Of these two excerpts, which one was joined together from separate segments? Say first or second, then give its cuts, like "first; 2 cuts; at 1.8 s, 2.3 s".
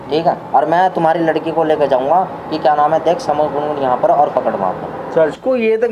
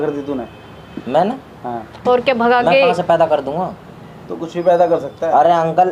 first; 1 cut; at 4.9 s